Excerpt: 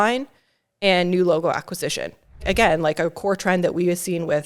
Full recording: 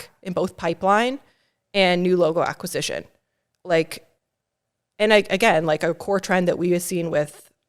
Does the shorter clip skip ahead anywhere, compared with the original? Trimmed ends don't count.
yes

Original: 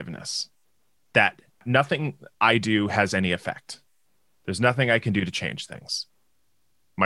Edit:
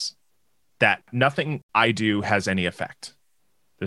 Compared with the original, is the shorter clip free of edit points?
no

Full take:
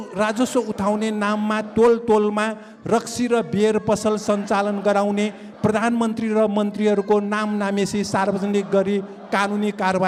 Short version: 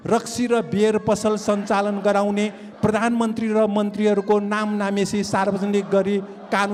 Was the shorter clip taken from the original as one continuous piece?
yes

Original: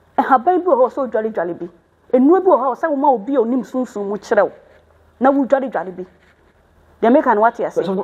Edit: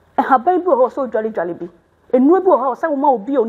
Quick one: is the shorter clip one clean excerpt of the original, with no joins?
yes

